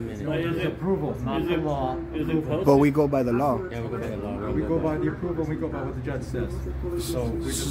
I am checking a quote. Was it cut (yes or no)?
no